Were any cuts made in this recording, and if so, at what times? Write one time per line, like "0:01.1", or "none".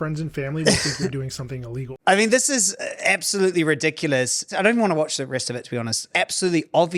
0:04.5
0:06.0